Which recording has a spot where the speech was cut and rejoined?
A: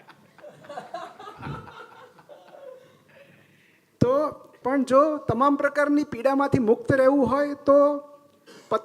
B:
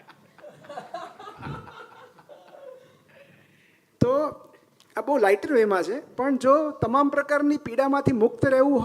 A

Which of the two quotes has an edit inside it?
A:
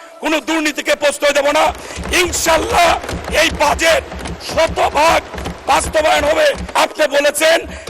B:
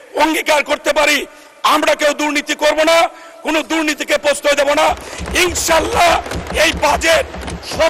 A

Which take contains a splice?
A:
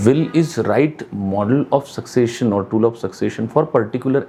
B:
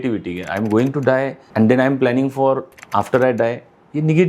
B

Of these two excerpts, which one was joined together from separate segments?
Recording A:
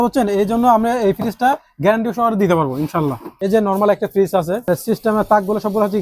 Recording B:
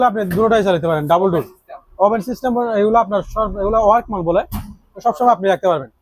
A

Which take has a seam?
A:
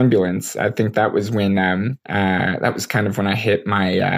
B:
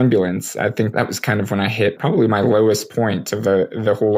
B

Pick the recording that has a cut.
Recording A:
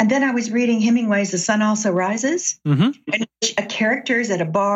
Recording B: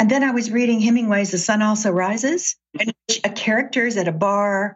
B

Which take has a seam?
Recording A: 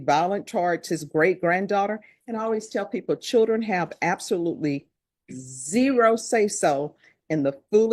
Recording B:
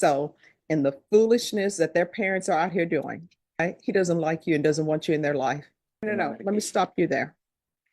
B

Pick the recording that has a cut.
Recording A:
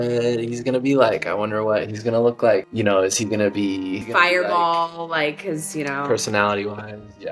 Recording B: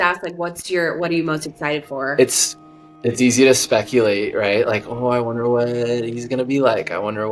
A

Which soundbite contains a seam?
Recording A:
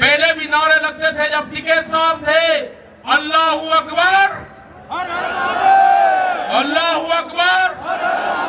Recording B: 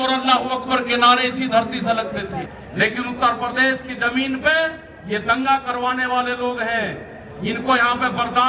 B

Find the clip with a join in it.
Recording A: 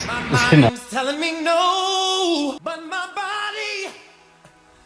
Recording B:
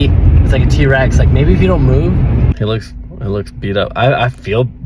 B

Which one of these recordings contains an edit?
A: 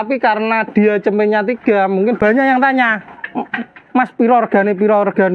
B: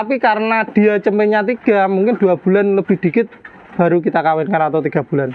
A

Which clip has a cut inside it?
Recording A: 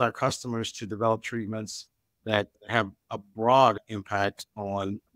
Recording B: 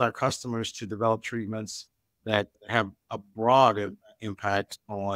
A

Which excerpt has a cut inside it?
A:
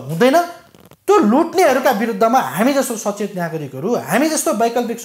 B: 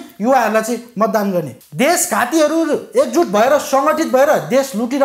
B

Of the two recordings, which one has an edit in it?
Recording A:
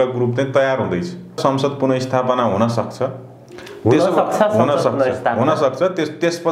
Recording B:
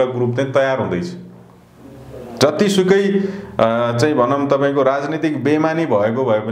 A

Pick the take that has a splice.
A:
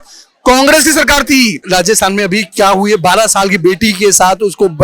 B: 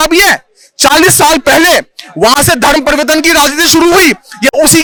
A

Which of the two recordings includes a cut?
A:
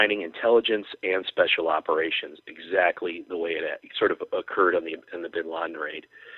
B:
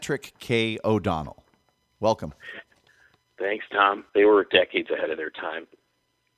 B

